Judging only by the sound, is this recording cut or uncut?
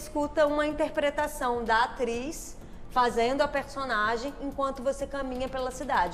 uncut